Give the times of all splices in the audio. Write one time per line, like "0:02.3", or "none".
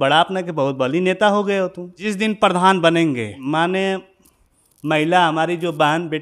0:02.1
0:03.3